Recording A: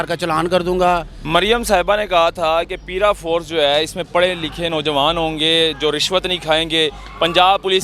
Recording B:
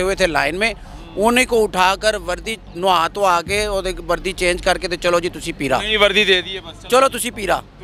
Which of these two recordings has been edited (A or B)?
A